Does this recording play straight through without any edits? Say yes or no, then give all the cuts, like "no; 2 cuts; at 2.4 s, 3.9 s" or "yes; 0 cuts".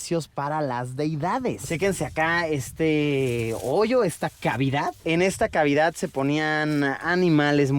no; 1 cut; at 1.6 s